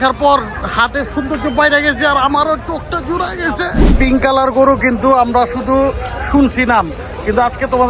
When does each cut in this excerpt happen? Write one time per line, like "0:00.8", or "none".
0:03.8